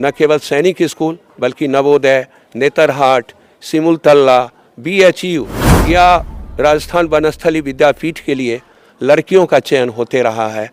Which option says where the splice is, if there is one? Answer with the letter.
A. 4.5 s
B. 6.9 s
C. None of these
C